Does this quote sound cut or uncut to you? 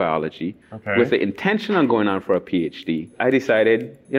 cut